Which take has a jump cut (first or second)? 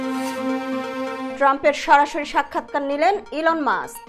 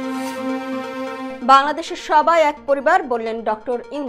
first